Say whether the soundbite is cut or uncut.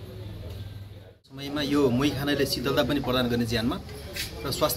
cut